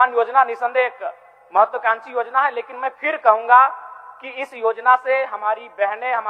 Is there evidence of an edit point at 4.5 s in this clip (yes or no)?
no